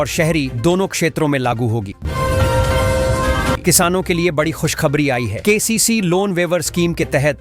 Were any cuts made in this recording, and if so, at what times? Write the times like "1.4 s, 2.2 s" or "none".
1.9 s, 3.6 s